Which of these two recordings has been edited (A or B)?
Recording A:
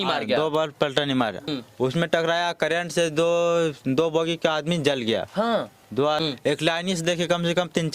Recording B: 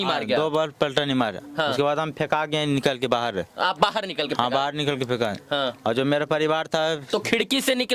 A